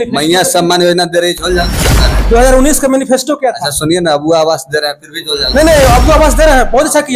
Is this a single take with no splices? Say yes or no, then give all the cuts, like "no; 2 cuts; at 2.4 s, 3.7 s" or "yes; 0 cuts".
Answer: yes; 0 cuts